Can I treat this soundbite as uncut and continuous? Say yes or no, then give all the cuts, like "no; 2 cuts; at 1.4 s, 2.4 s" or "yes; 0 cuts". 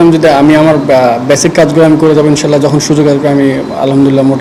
yes; 0 cuts